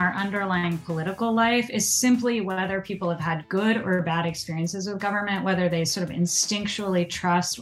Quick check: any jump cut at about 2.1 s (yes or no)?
no